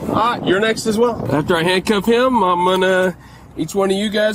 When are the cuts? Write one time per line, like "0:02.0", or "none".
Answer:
0:01.3